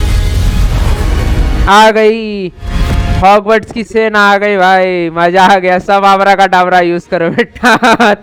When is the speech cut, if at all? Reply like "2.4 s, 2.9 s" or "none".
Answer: none